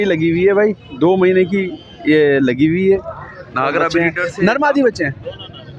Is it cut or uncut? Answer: cut